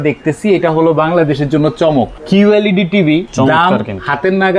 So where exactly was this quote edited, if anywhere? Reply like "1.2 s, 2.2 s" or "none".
2.2 s, 3.3 s